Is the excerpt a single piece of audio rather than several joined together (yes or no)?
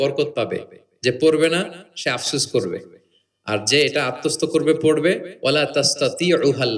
yes